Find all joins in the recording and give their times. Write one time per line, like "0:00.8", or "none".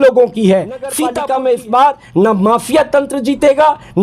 0:01.0